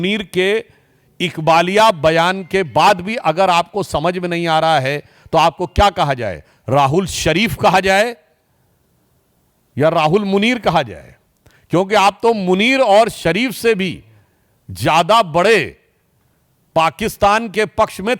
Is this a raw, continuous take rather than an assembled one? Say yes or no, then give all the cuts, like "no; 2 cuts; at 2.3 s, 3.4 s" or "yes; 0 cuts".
yes; 0 cuts